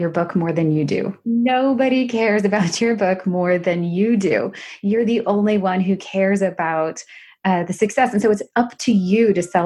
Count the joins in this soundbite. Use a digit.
1